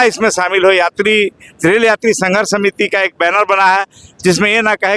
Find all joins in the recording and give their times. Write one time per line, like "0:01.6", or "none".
none